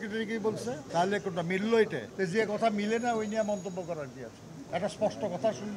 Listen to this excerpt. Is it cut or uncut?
cut